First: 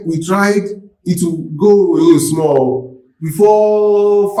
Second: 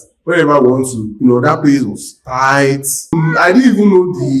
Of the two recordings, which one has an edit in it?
second; 2 cuts; at 1.0 s, 3.1 s

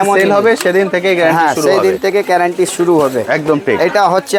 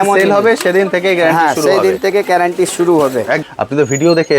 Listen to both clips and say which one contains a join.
second; 1 cut; at 3.4 s

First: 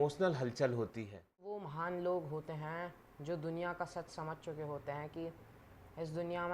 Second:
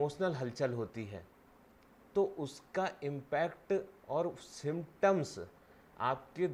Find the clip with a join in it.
first; 1 cut; at 1.7 s

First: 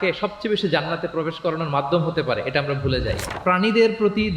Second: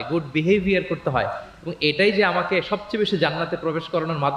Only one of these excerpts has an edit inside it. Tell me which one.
first; 1 cut; at 3.4 s

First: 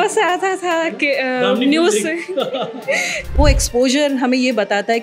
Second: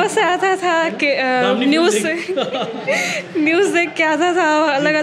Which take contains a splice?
first; 1 cut; at 3.2 s

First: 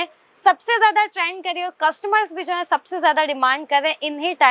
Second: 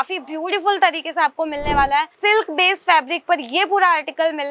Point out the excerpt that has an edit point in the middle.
second; 1 cut; at 2.1 s

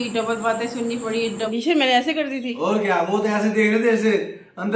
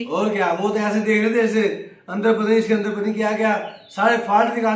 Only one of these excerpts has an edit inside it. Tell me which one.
first; 1 cut; at 1.5 s

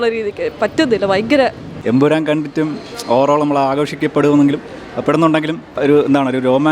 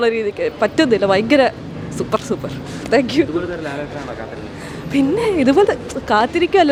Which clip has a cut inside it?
first; 2 cuts; at 1.7 s, 5.7 s

